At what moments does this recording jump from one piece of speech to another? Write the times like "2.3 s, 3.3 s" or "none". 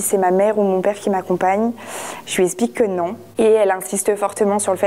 none